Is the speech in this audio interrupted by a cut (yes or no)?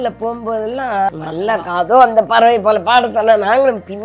yes